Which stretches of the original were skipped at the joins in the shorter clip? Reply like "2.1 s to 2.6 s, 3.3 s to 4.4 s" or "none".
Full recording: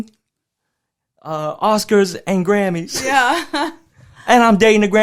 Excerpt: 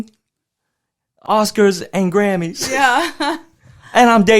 1.2 s to 1.5 s